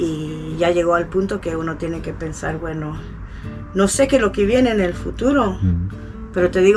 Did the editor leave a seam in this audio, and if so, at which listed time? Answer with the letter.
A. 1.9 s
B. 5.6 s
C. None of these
C